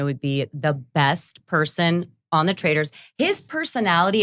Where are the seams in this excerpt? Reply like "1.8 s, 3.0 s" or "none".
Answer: none